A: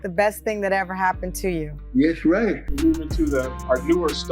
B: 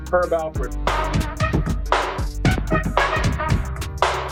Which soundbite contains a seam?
A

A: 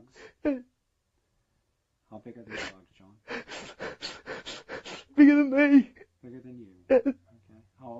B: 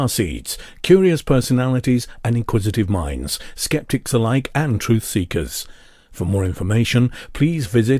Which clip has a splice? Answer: A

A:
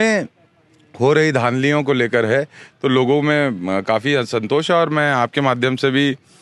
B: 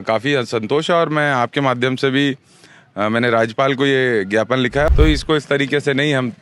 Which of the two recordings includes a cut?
B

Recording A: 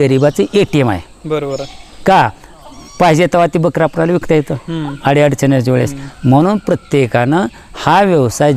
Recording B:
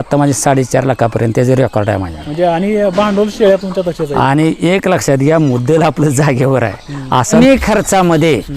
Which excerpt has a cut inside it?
B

